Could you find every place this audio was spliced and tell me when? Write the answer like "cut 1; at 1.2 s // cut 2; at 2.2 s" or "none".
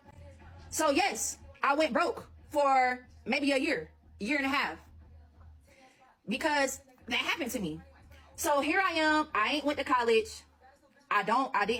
none